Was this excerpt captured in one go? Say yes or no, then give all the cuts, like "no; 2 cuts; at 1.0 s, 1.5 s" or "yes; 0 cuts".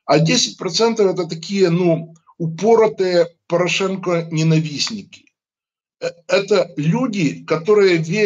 yes; 0 cuts